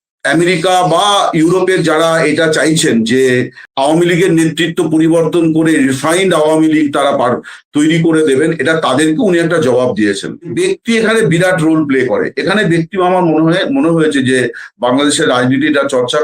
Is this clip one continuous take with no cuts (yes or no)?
no